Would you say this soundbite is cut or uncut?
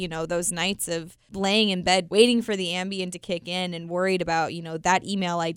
cut